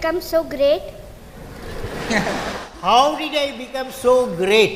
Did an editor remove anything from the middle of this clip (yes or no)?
no